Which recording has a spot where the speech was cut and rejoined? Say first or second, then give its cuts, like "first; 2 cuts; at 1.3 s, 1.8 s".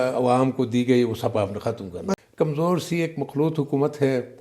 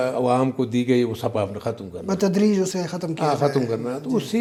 first; 1 cut; at 2.2 s